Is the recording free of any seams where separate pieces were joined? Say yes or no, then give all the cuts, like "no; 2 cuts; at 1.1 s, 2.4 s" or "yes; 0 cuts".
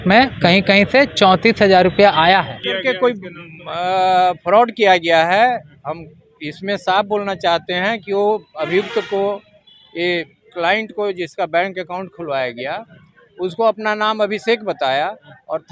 no; 1 cut; at 2.7 s